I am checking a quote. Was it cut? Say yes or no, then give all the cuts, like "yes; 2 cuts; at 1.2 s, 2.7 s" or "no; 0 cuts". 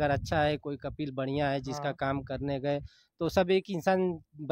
no; 0 cuts